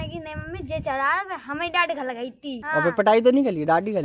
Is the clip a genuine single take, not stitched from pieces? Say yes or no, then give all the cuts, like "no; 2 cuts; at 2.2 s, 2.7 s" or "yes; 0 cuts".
no; 1 cut; at 2.6 s